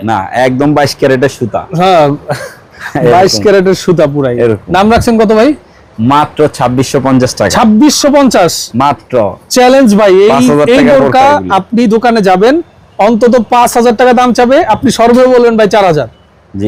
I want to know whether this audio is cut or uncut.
uncut